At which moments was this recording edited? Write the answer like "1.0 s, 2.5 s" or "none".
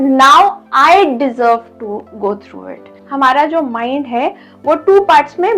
3.0 s